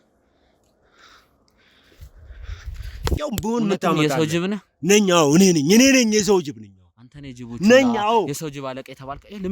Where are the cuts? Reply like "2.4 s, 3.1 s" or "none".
3.1 s